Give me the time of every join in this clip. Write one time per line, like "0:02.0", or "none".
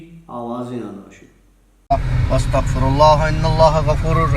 0:01.8